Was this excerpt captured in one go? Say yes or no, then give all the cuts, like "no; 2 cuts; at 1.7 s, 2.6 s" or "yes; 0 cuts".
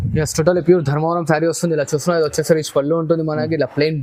yes; 0 cuts